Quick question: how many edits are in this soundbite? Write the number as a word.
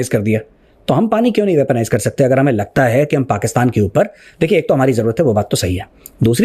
zero